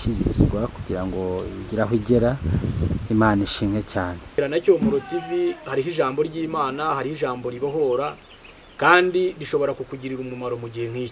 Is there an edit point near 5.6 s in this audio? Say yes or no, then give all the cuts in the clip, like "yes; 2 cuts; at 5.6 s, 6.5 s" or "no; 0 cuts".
no; 1 cut; at 4.3 s